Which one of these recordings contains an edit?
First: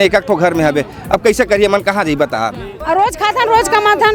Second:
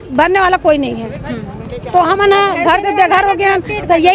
first; 1 cut; at 2.7 s

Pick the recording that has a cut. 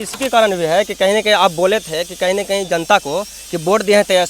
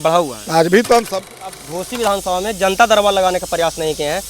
second; 1 cut; at 1.2 s

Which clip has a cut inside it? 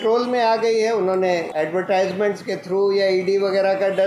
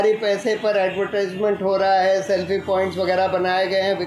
first; 1 cut; at 1.5 s

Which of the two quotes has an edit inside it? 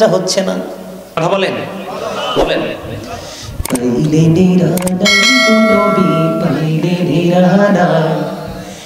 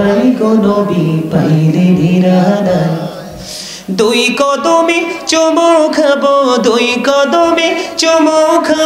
first; 1 cut; at 1.1 s

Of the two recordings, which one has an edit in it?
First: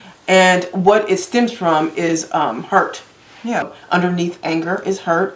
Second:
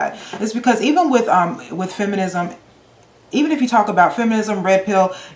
first; 1 cut; at 3.8 s

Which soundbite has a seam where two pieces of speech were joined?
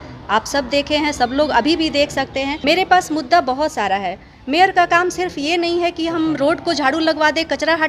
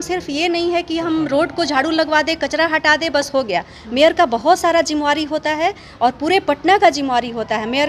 first; 1 cut; at 2.6 s

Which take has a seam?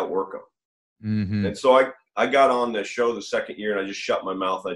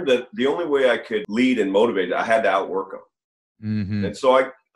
second; 1 cut; at 1.3 s

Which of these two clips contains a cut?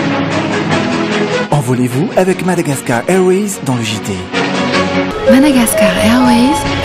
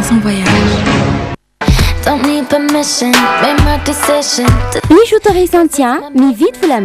second; 1 cut; at 1.4 s

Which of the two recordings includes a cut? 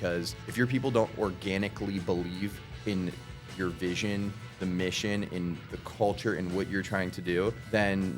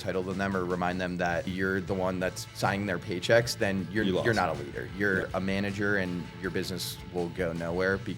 second; 2 cuts; at 1.5 s, 5.3 s

